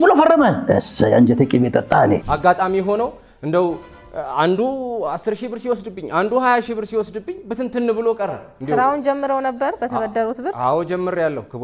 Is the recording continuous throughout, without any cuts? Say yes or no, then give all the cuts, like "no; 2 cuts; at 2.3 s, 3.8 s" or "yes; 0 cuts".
no; 1 cut; at 2.3 s